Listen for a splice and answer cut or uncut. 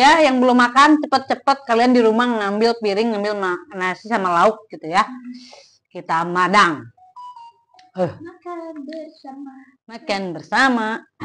uncut